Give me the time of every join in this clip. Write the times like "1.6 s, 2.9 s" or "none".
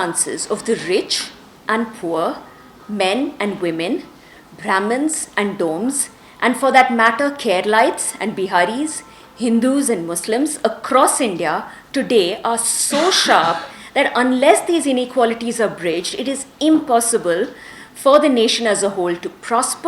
none